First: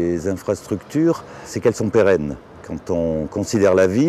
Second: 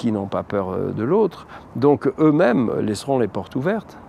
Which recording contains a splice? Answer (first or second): first